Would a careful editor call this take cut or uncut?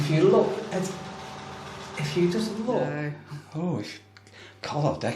cut